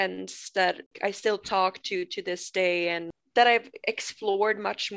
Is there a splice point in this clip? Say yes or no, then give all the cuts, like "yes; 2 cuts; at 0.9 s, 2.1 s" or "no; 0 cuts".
yes; 2 cuts; at 0.9 s, 3.1 s